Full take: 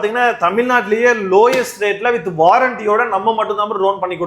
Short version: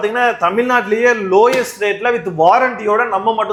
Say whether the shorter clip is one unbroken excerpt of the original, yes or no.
yes